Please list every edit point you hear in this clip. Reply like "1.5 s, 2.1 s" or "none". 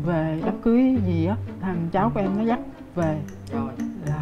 1.5 s